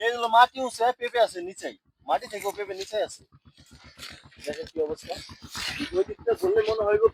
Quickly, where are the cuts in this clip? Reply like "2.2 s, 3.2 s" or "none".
none